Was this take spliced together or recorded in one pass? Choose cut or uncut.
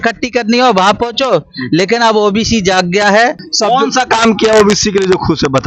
cut